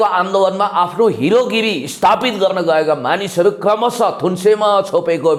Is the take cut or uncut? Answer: uncut